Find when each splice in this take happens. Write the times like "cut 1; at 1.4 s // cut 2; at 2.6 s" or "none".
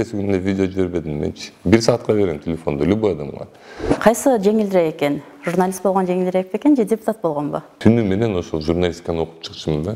cut 1; at 4.0 s // cut 2; at 7.7 s